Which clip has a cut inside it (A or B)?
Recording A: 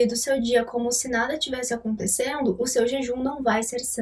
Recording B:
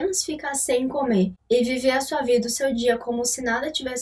B